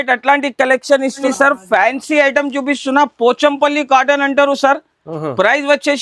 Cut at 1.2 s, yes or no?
yes